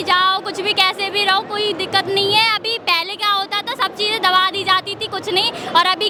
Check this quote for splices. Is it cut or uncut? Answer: uncut